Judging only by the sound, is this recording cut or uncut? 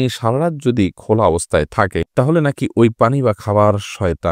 uncut